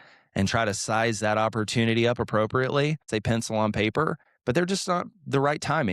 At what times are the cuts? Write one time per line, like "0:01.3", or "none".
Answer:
0:03.0